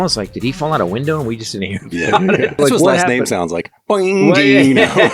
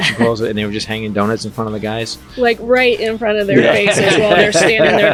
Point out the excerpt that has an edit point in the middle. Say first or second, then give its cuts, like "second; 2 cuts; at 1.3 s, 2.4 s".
first; 1 cut; at 2.5 s